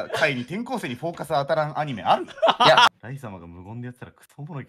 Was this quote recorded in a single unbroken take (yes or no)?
no